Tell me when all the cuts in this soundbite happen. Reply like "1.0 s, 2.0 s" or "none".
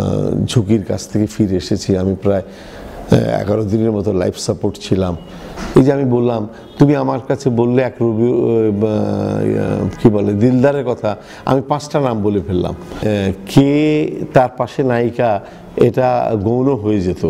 5.5 s, 13.0 s